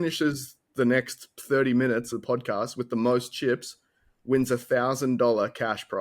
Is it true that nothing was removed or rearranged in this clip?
no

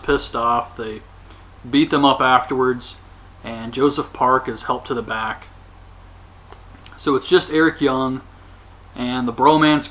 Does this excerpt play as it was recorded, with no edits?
no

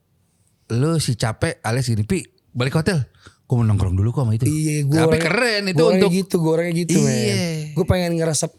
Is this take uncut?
yes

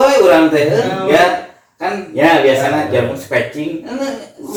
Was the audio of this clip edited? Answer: no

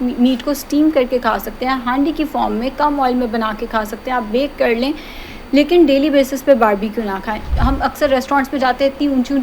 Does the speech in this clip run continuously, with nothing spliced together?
no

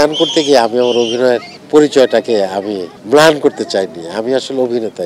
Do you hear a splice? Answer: yes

